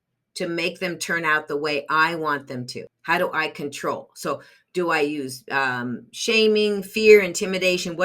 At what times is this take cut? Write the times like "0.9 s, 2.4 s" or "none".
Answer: 2.9 s